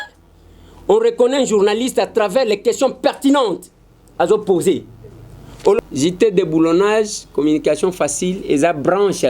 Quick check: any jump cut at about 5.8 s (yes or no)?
yes